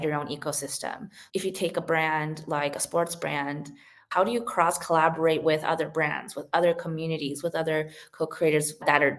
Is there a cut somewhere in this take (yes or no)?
yes